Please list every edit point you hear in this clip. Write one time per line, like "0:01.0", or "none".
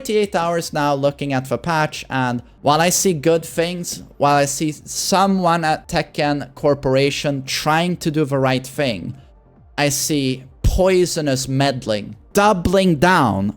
0:02.5
0:05.8
0:12.2